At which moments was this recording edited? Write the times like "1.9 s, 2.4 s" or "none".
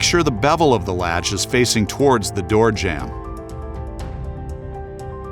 3.1 s